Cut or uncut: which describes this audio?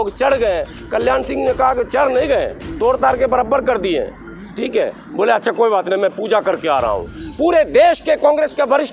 uncut